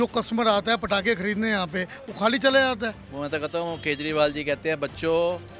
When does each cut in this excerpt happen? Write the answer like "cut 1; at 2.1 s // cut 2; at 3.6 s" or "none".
cut 1; at 3.1 s